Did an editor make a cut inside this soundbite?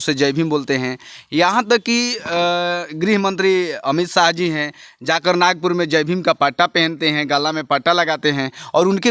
no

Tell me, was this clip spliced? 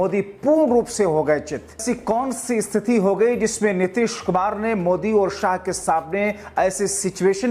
yes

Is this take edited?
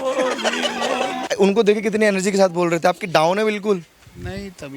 yes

